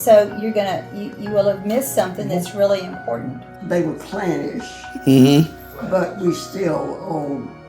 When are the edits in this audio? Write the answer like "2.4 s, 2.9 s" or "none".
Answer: 3.4 s